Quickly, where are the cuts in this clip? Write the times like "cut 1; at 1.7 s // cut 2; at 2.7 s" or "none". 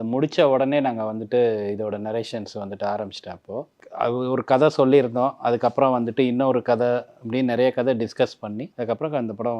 cut 1; at 3.8 s // cut 2; at 8.7 s